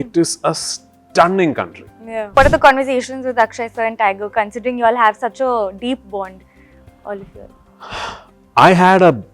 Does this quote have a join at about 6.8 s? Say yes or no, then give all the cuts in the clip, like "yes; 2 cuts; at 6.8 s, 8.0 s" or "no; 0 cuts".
no; 1 cut; at 2.4 s